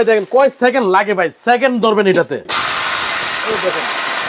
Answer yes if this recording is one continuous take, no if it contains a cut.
no